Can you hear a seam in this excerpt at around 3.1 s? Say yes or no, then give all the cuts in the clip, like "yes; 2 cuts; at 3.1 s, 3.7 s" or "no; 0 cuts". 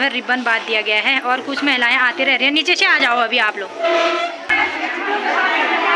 no; 1 cut; at 4.6 s